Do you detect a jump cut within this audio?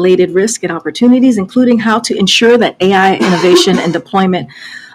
yes; 1 cut; at 3.3 s

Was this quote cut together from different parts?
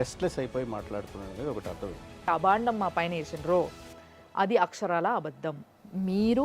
yes; 1 cut; at 2.3 s

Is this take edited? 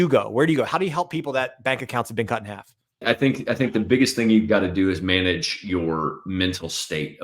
yes; 1 cut; at 3.0 s

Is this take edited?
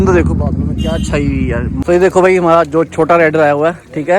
yes; 1 cut; at 1.8 s

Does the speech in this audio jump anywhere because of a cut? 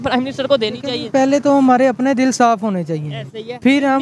no; 0 cuts

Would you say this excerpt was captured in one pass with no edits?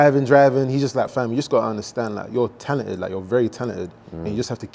no; 1 cut; at 1.1 s

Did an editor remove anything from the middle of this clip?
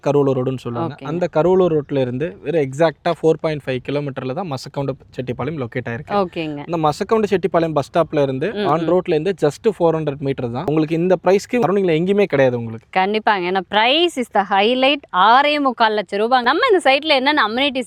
no; 0 cuts

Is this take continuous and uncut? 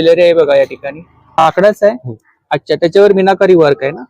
no; 1 cut; at 1.4 s

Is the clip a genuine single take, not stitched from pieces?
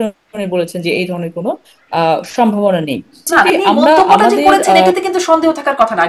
no; 1 cut; at 3.3 s

